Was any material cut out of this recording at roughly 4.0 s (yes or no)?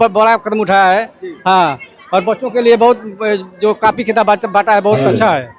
no